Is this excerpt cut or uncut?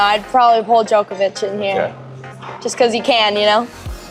uncut